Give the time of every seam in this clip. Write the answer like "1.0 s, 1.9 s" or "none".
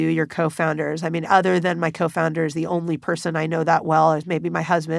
none